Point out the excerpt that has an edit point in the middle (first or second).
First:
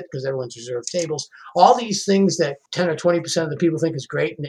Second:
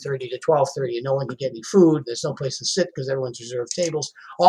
first